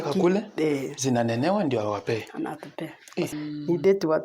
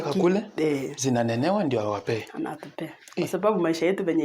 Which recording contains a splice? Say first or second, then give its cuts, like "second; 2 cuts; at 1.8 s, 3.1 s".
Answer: first; 1 cut; at 3.3 s